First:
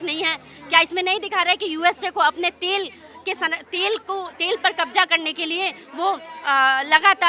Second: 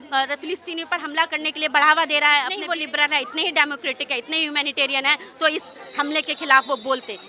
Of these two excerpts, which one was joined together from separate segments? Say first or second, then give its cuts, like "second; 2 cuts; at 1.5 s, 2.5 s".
second; 1 cut; at 2.6 s